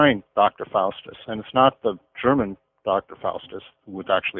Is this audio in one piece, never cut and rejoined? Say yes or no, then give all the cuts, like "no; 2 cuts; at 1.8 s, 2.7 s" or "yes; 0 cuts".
yes; 0 cuts